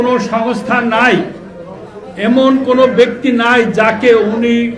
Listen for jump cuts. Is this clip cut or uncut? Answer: uncut